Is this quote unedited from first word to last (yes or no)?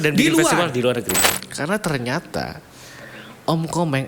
no